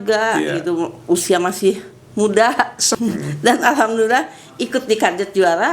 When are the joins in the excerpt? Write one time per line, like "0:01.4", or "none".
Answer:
0:02.8

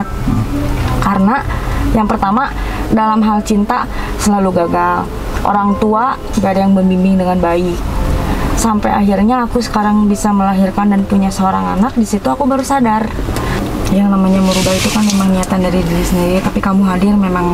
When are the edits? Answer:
0:13.6

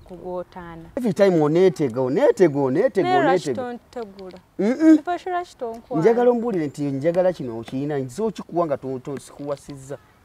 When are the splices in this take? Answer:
0:01.0

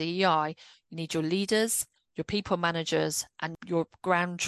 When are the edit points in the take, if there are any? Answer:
0:03.5

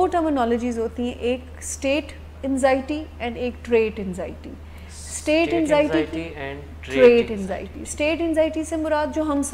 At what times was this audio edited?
none

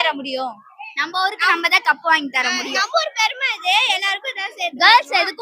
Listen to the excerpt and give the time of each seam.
none

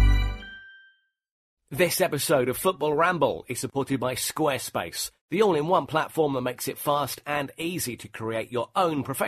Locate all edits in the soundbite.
0:01.6

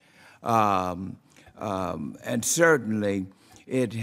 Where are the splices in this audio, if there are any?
none

